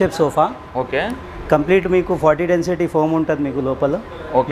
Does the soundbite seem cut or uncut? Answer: uncut